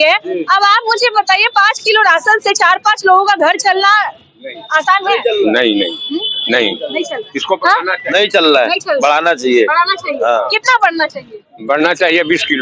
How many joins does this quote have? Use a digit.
0